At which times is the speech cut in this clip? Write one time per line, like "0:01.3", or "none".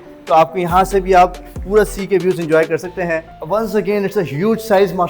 0:03.3